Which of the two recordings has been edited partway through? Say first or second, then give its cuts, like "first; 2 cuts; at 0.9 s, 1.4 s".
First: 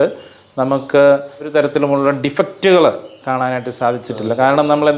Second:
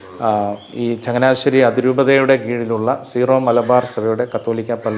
first; 1 cut; at 1.5 s